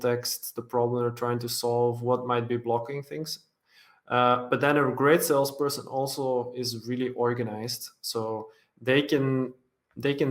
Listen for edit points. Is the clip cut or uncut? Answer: uncut